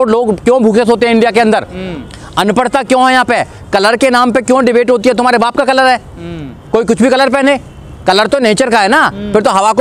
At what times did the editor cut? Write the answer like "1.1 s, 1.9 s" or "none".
none